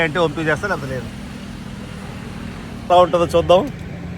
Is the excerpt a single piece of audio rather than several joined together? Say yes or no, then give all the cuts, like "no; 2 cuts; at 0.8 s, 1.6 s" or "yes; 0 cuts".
no; 1 cut; at 2.9 s